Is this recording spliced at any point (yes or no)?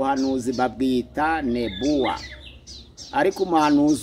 no